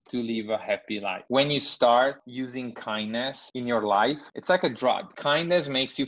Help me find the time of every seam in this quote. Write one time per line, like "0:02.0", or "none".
0:01.2
0:02.2
0:03.4
0:04.2
0:05.1